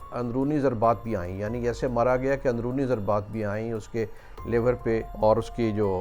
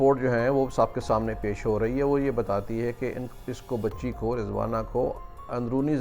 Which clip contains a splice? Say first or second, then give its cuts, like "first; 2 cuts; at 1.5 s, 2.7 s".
first; 1 cut; at 5.1 s